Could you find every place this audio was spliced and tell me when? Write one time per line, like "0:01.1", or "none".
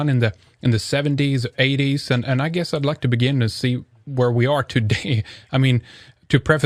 0:02.2